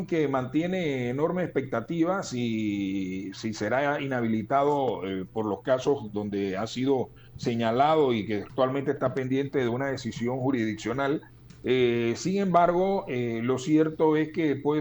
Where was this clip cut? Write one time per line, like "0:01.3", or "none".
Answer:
none